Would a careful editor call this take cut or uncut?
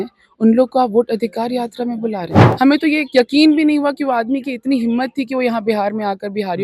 cut